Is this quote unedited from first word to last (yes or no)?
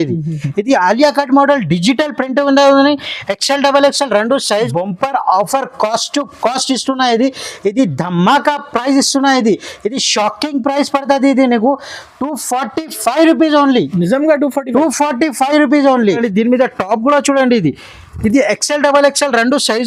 no